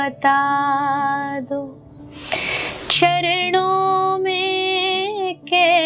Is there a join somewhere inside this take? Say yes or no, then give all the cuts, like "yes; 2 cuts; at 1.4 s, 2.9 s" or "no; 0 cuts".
no; 0 cuts